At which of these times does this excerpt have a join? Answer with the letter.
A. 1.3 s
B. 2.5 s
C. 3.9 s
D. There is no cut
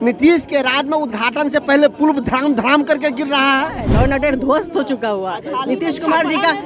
C